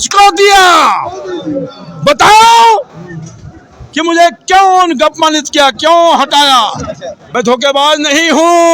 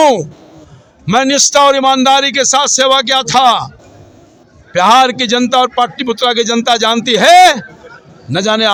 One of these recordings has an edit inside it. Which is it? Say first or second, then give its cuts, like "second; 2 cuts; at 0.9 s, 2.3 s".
first; 1 cut; at 7.1 s